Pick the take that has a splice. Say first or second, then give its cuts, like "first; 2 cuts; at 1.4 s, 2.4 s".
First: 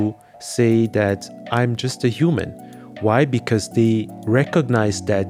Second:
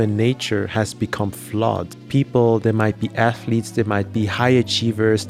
second; 1 cut; at 1.9 s